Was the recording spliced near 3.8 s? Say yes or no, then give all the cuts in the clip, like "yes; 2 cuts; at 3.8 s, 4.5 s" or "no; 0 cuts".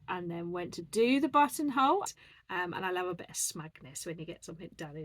no; 1 cut; at 2.0 s